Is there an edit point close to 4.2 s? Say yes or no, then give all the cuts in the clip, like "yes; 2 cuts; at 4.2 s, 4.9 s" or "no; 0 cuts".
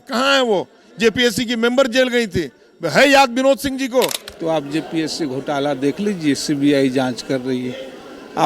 yes; 1 cut; at 4.2 s